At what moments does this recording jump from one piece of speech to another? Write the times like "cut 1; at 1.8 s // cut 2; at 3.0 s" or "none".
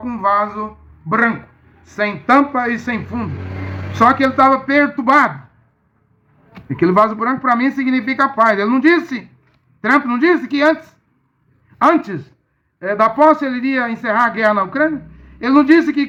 none